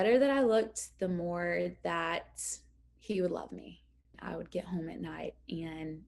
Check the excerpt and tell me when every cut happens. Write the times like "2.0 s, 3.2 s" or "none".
4.2 s